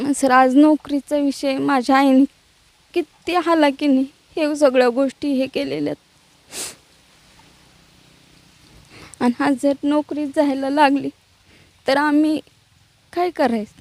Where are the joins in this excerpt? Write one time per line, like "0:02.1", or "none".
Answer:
none